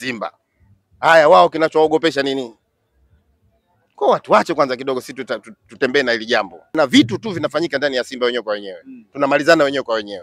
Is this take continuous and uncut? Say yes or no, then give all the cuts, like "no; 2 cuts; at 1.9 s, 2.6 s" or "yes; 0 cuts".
no; 1 cut; at 6.7 s